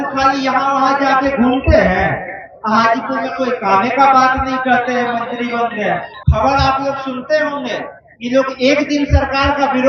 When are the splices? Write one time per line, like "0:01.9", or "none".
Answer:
0:06.1